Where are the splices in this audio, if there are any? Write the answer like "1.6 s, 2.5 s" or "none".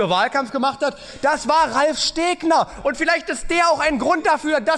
none